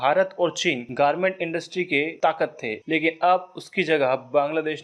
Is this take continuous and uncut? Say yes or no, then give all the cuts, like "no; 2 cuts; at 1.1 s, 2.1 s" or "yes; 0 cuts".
yes; 0 cuts